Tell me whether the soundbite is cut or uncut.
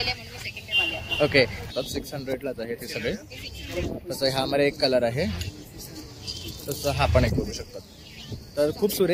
cut